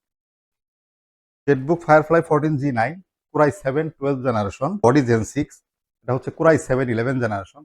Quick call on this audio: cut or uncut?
cut